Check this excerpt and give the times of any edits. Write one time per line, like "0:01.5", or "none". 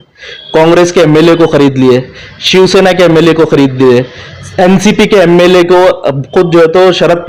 none